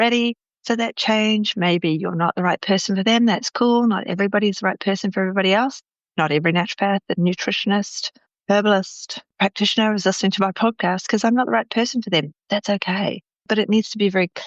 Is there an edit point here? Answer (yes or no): no